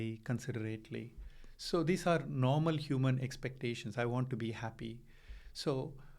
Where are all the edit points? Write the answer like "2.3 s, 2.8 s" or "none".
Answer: none